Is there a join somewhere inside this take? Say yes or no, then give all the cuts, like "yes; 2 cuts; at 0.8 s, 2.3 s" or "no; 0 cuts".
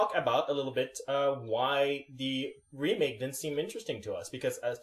no; 0 cuts